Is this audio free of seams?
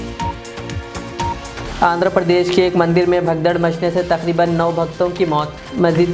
no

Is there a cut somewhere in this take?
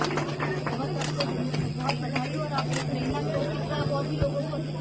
no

